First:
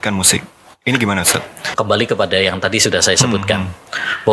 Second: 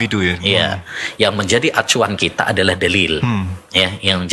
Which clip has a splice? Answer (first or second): first